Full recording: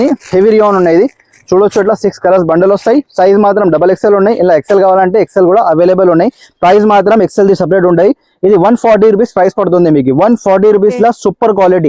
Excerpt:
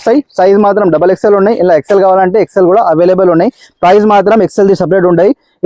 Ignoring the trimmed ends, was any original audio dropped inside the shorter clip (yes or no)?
no